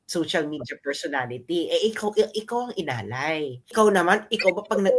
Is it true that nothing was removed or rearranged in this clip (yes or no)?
no